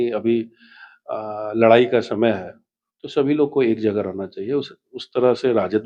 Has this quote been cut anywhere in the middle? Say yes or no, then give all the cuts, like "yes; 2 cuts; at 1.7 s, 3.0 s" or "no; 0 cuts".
no; 0 cuts